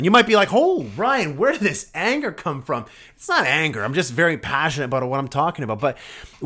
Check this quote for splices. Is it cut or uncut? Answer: uncut